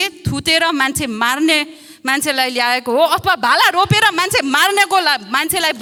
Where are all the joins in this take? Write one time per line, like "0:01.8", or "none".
none